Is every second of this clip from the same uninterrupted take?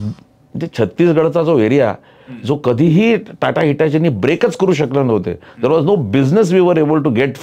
yes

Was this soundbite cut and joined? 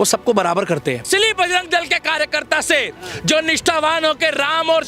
yes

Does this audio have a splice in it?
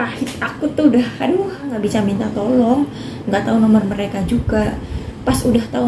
yes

